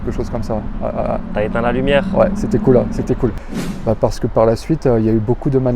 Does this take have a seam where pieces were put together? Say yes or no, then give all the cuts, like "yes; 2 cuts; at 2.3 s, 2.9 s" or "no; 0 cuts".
yes; 1 cut; at 3.4 s